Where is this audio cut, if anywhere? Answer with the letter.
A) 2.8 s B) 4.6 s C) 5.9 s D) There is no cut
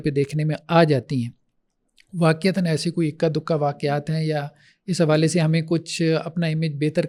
D